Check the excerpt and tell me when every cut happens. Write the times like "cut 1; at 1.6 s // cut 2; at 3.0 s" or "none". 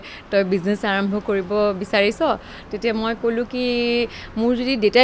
none